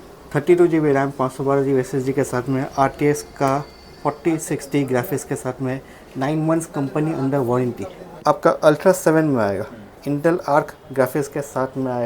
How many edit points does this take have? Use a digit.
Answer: 1